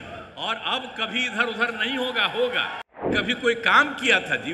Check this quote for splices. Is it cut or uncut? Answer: cut